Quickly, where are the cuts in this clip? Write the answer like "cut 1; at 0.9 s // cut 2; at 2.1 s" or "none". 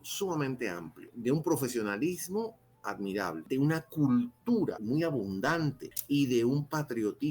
cut 1; at 1.1 s // cut 2; at 3.4 s // cut 3; at 4.8 s // cut 4; at 5.9 s